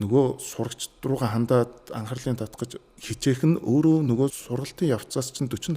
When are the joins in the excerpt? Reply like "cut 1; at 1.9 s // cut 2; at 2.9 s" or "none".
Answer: cut 1; at 2.9 s // cut 2; at 4.4 s